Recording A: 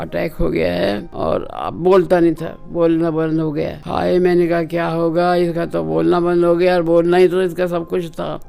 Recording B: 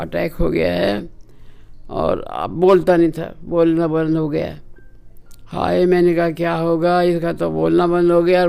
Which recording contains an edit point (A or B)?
A